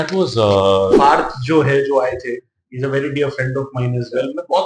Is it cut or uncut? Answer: cut